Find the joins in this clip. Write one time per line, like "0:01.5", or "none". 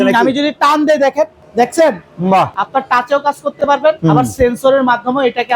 0:01.4
0:02.6
0:04.0